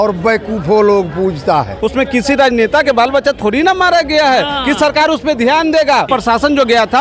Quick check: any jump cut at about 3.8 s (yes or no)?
no